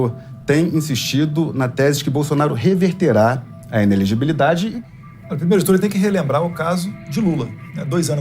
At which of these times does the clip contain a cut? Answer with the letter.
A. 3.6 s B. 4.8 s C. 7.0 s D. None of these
B